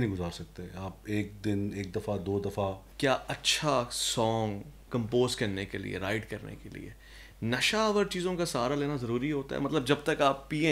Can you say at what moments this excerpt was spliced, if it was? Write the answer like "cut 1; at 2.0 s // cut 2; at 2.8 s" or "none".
cut 1; at 2.9 s // cut 2; at 4.8 s